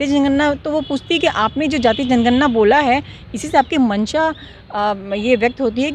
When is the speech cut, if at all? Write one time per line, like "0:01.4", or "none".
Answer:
none